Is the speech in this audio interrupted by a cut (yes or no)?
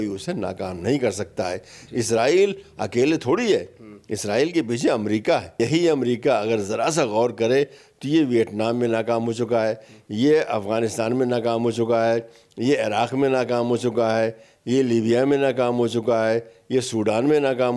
yes